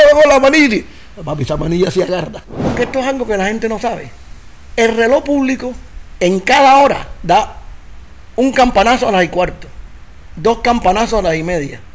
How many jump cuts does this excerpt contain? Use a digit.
1